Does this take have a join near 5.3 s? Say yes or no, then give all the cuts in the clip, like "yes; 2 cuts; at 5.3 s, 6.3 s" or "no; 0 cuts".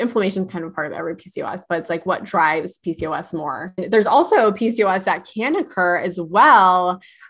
no; 1 cut; at 3.8 s